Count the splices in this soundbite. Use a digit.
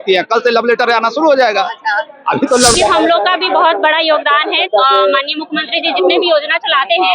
1